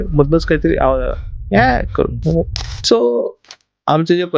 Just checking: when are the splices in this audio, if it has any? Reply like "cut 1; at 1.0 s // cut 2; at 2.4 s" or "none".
cut 1; at 2.7 s